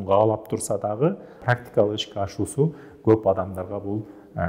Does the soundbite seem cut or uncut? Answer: cut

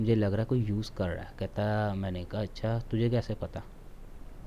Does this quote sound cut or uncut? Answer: uncut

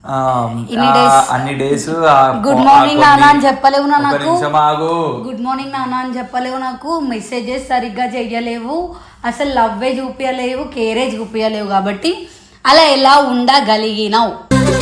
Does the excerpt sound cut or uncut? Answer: uncut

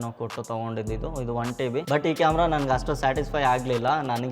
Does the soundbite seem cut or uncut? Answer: cut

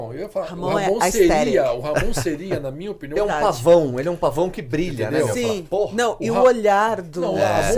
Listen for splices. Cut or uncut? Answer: cut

